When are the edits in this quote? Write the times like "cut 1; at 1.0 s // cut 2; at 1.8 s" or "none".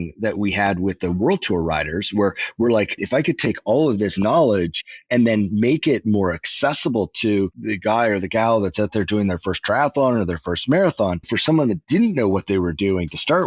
cut 1; at 3.0 s // cut 2; at 11.3 s